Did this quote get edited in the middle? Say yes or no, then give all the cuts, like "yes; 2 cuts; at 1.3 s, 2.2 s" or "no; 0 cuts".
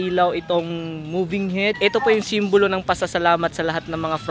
yes; 1 cut; at 1.8 s